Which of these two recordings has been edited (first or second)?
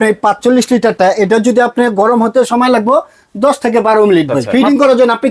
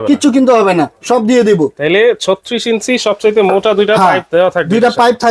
first